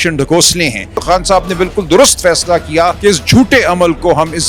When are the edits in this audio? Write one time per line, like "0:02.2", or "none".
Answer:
0:00.9
0:03.0